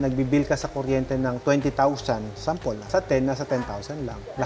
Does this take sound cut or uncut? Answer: uncut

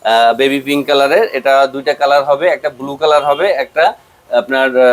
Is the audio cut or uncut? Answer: uncut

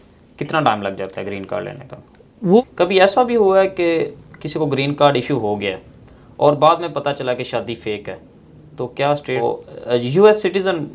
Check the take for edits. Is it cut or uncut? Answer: cut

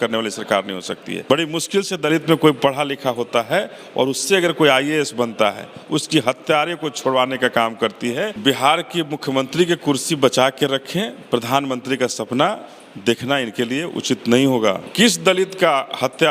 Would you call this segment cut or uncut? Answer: cut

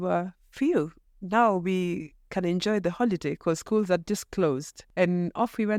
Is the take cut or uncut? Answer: uncut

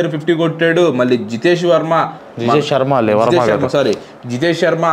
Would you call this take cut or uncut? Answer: cut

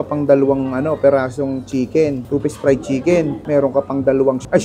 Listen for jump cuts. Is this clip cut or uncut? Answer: uncut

